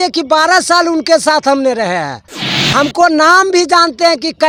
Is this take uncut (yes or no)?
yes